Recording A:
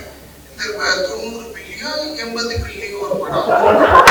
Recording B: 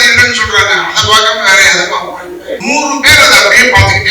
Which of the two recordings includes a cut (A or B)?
B